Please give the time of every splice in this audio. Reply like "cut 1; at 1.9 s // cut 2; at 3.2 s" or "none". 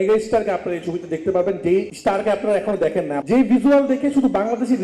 cut 1; at 1.9 s // cut 2; at 3.2 s